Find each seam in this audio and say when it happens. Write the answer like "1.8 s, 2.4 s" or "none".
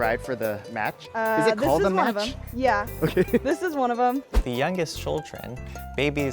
1.0 s, 4.4 s